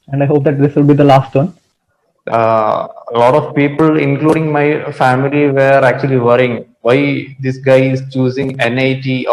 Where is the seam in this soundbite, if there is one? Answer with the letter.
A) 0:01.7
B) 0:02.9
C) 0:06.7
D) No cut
A